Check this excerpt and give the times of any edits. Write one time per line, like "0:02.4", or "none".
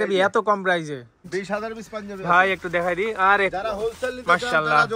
0:01.3